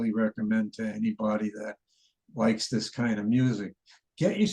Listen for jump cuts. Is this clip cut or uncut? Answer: uncut